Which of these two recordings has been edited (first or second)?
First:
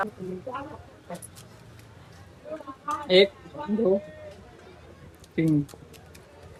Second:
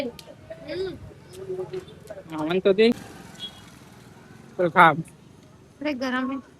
second